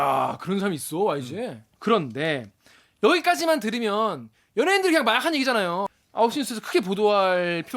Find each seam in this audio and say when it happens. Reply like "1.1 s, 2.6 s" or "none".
1.7 s, 6.0 s